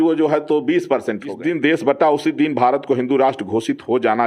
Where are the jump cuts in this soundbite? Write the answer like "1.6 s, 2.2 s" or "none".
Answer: 1.3 s